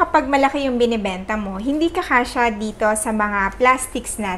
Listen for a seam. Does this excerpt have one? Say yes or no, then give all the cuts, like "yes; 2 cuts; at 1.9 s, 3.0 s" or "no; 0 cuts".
no; 0 cuts